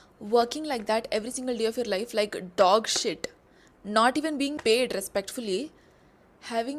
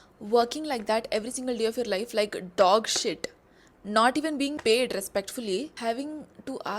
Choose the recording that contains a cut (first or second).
second